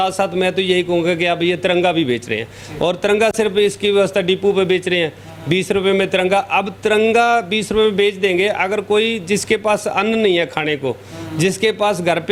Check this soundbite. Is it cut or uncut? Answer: uncut